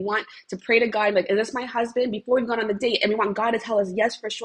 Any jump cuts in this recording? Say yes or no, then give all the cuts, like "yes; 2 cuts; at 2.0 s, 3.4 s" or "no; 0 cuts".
no; 0 cuts